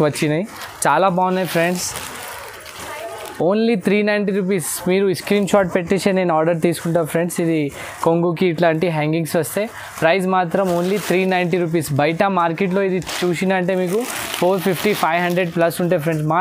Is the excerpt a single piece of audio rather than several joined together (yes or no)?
yes